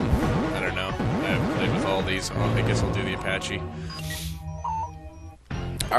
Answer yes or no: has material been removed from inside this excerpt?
no